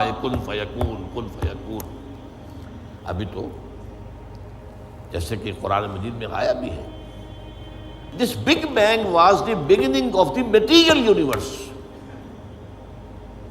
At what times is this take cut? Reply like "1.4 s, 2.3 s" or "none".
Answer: 8.1 s